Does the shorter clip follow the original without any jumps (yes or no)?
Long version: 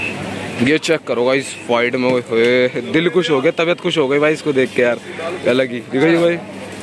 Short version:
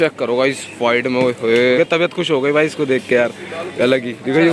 no